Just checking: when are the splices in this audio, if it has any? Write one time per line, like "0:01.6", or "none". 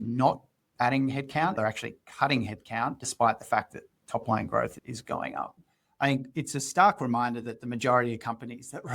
0:01.6
0:05.6